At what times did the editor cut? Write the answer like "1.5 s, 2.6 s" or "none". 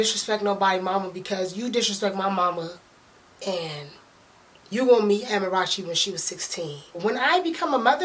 7.0 s

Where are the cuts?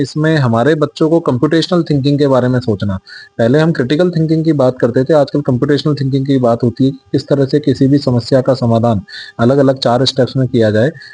none

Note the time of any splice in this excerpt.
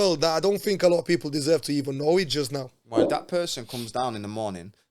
3.0 s

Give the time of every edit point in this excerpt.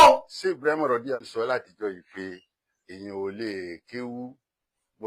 1.2 s

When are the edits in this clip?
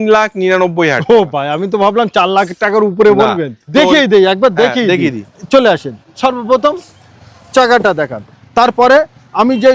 3.7 s

